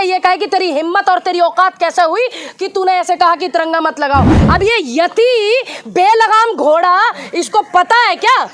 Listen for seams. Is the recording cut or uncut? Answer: cut